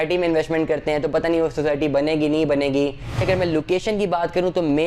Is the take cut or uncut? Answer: cut